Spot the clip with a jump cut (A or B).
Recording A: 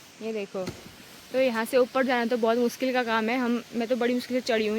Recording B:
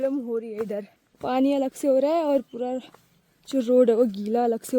B